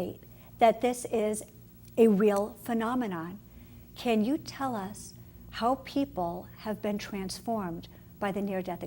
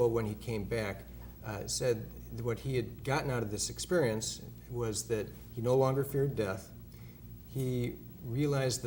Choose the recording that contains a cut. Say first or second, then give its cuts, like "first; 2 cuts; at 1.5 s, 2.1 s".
first; 1 cut; at 3.3 s